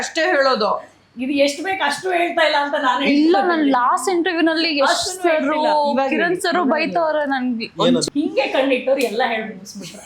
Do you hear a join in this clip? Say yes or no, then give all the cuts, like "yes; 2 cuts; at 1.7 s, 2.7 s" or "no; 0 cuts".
yes; 1 cut; at 8.0 s